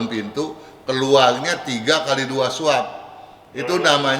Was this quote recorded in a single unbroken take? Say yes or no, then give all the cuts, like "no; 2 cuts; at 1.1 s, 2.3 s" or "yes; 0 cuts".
yes; 0 cuts